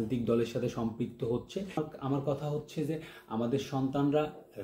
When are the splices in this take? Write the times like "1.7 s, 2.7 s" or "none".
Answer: 1.8 s